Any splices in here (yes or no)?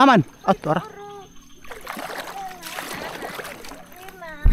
no